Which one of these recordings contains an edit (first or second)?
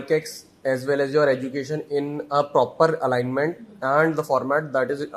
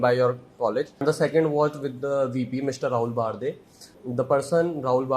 second